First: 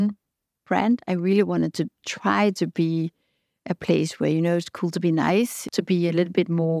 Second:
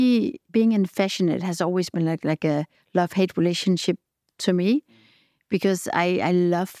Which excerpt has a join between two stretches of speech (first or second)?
first